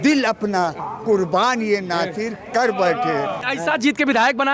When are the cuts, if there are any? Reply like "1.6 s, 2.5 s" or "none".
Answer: 3.4 s